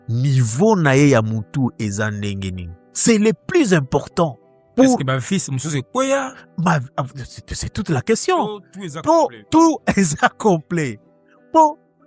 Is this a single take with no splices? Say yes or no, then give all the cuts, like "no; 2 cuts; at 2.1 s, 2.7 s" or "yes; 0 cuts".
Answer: yes; 0 cuts